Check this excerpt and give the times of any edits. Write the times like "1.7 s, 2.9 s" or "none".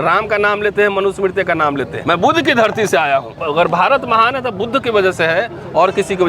1.9 s, 3.4 s